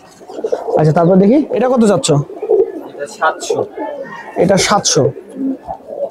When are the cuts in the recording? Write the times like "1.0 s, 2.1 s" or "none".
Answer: 1.5 s